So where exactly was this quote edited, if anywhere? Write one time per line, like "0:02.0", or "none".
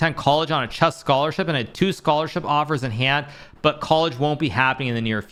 none

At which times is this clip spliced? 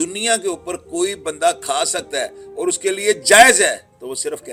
none

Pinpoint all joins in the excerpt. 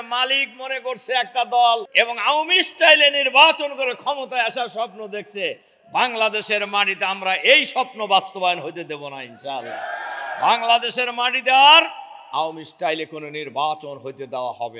0:01.9

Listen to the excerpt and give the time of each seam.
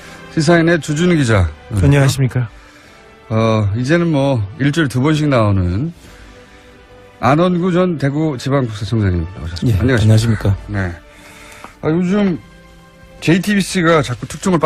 0:02.5

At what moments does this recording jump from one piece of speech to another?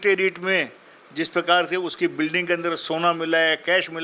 none

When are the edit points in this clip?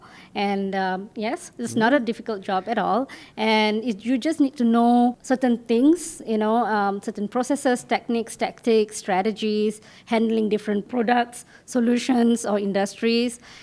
0:05.2

